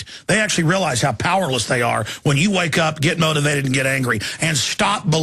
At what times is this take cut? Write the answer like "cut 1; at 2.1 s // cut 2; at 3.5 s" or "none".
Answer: cut 1; at 1.1 s

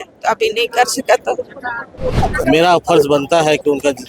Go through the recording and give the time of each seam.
cut 1; at 2.2 s

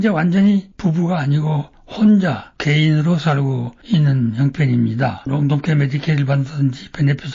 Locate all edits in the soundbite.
cut 1; at 5.3 s

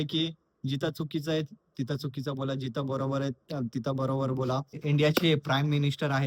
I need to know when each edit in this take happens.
cut 1; at 4.8 s

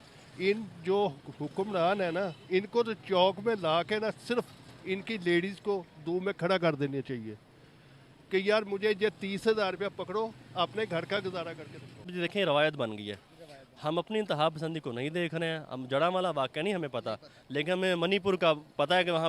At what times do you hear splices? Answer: cut 1; at 12.1 s

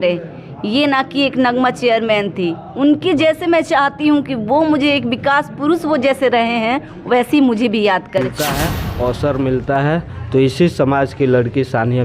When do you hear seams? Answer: cut 1; at 8.5 s

